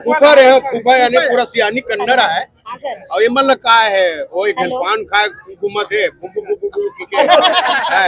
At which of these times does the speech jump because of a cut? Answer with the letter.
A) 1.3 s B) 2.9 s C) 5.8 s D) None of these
D